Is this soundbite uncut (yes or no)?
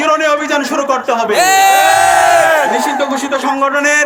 yes